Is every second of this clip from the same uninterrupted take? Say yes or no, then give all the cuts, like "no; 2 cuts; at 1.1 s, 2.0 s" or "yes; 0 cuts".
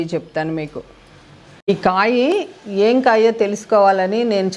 no; 1 cut; at 1.5 s